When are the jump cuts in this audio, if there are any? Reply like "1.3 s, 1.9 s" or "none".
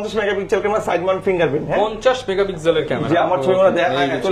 none